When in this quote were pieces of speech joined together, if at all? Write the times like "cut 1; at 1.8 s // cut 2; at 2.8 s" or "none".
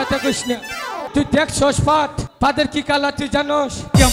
cut 1; at 1.0 s // cut 2; at 2.2 s